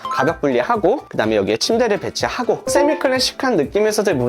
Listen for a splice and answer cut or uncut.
cut